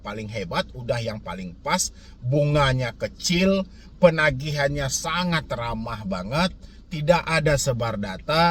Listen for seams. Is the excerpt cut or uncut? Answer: uncut